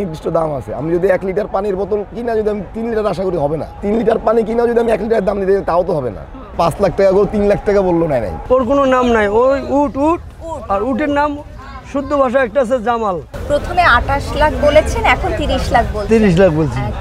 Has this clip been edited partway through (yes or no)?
yes